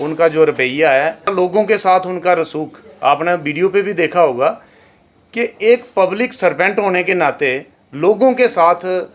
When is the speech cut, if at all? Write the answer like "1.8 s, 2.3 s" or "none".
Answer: none